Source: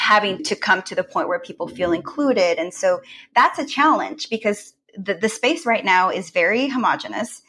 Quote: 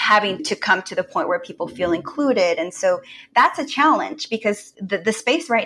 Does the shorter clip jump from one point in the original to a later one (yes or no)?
yes